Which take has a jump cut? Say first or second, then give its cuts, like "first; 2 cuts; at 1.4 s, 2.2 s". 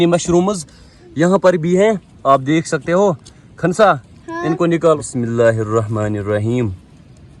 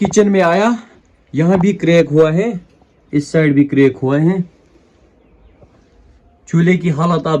first; 1 cut; at 5.0 s